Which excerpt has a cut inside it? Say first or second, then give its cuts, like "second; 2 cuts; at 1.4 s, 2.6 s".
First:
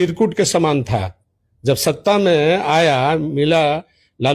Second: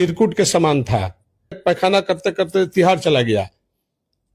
second; 1 cut; at 1.6 s